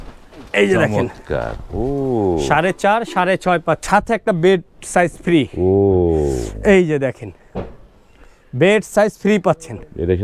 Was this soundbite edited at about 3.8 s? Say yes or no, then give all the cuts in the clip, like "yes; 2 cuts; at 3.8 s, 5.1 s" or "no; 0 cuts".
yes; 1 cut; at 3.8 s